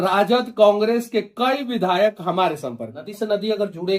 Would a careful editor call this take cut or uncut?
cut